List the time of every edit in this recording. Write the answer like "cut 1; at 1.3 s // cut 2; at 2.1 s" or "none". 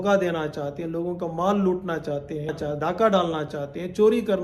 cut 1; at 2.5 s

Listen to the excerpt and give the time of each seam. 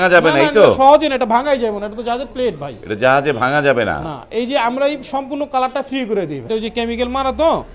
cut 1; at 6.5 s

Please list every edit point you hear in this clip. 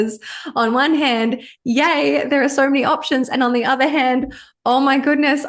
none

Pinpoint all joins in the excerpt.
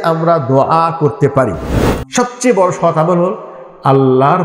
cut 1; at 1.6 s

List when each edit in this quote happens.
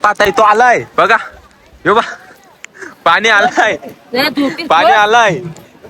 none

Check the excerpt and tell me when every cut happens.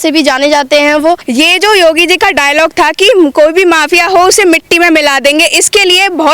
cut 1; at 1.2 s

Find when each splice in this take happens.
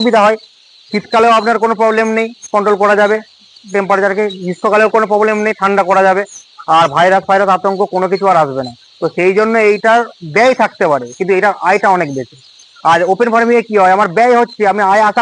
none

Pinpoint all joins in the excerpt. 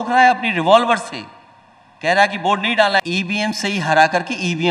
cut 1; at 3.0 s

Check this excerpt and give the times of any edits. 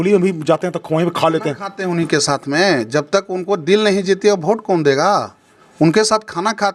none

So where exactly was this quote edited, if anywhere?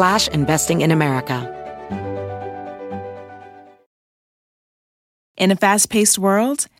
cut 1; at 1.4 s

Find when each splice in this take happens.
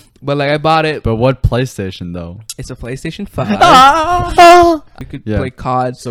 cut 1; at 4.9 s

